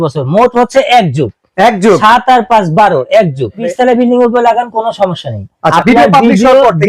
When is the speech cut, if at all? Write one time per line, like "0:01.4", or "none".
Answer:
0:03.7
0:05.7